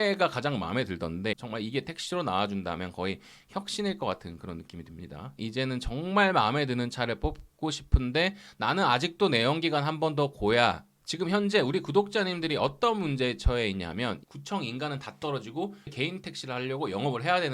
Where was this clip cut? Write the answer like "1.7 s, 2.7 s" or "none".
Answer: 1.4 s, 5.3 s, 10.9 s, 14.2 s, 15.9 s